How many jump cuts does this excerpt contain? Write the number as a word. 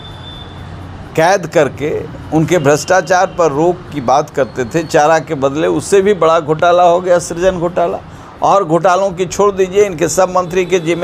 zero